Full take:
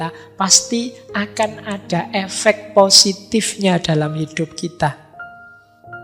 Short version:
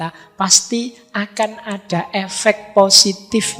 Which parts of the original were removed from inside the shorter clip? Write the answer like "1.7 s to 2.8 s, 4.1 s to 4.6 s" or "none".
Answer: none